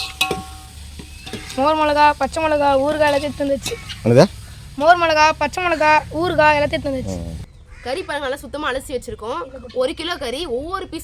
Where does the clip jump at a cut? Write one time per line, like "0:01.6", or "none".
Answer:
0:07.4